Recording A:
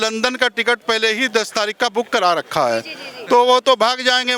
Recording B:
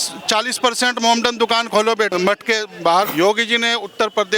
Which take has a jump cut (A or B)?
B